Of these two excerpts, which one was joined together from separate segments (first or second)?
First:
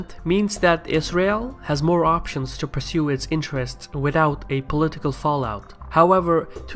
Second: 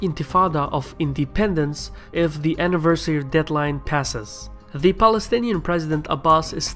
first